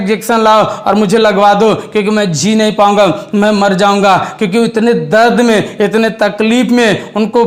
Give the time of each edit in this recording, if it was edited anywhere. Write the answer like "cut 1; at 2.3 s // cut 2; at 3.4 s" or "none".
none